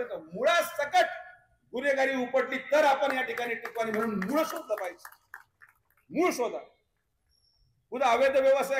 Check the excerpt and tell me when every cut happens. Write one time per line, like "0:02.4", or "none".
none

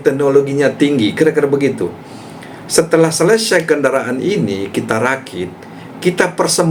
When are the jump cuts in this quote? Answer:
none

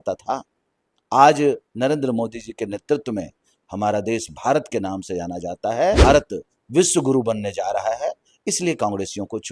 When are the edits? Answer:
0:06.0

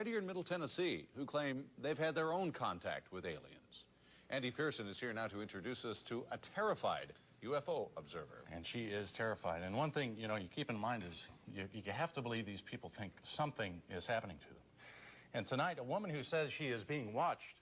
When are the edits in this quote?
none

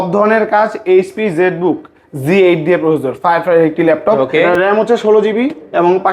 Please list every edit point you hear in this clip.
0:04.2

